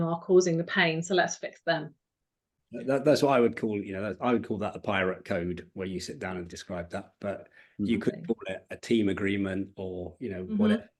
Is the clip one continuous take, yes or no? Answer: yes